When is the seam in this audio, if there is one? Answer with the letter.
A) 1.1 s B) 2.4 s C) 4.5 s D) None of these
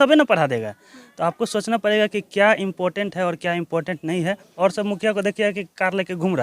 C